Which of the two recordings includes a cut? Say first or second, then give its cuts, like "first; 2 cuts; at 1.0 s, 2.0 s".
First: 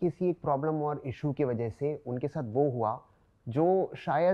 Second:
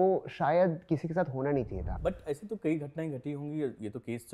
second; 1 cut; at 1.8 s